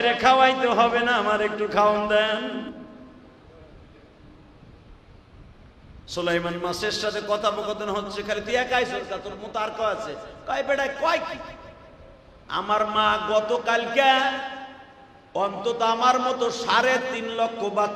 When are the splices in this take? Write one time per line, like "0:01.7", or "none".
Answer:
none